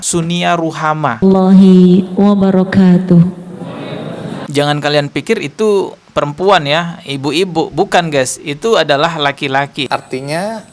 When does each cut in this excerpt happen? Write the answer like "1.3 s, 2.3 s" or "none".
1.2 s, 4.5 s, 9.8 s